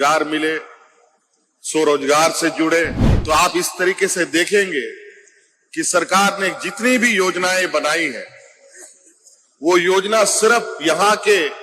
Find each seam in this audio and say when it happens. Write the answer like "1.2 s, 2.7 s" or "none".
3.1 s